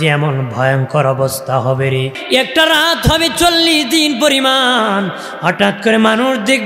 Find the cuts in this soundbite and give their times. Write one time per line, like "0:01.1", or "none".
0:02.1